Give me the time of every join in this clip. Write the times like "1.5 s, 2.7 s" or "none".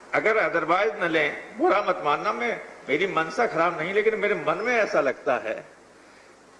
none